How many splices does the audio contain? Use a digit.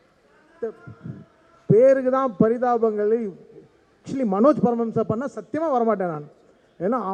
1